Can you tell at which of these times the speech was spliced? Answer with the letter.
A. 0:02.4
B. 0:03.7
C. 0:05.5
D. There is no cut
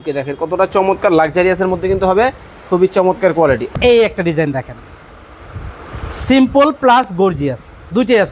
B